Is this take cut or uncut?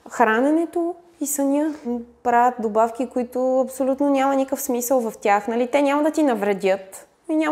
cut